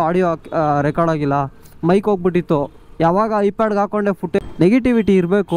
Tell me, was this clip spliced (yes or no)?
yes